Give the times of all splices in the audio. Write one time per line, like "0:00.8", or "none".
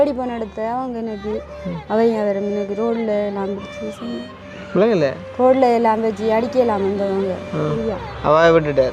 0:07.8